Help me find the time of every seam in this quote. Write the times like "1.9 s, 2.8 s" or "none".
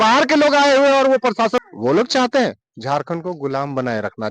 1.6 s